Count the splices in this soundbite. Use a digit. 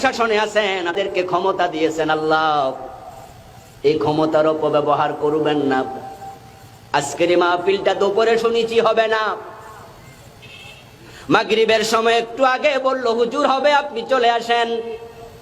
1